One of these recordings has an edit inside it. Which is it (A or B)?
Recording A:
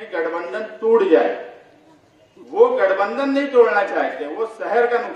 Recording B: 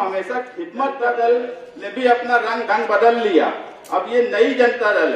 B